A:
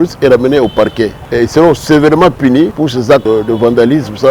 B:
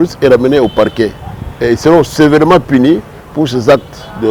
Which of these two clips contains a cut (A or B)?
A